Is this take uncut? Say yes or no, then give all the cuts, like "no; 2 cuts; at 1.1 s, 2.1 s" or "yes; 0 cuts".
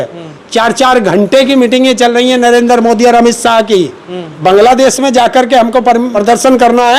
no; 2 cuts; at 4.2 s, 6.1 s